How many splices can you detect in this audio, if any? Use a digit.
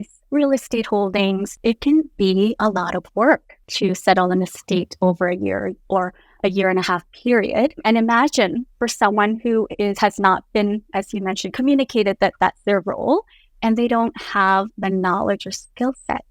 3